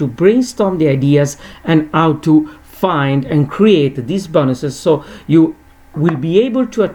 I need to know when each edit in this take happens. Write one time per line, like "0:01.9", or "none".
none